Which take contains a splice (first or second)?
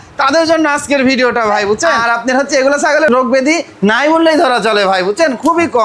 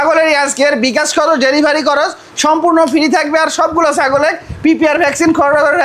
first